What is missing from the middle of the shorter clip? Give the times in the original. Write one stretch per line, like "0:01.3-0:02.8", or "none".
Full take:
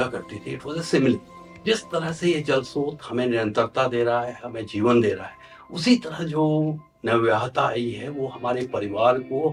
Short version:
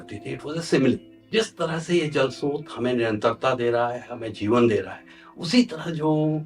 0:01.3-0:01.5